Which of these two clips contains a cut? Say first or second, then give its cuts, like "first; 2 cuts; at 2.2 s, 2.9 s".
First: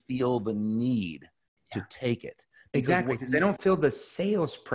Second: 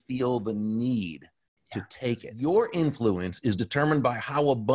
second; 1 cut; at 2.3 s